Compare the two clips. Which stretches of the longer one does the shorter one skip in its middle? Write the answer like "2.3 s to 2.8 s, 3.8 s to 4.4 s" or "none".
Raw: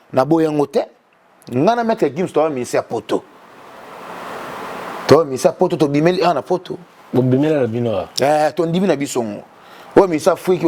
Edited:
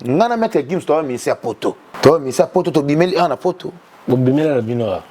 3.3 s to 4.9 s